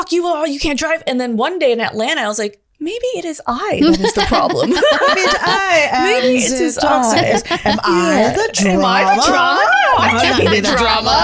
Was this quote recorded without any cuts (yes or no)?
yes